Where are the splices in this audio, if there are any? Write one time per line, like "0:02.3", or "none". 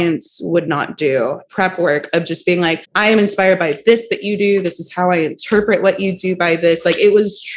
0:01.4
0:02.9